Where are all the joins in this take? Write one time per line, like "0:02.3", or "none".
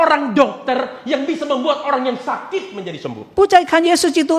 none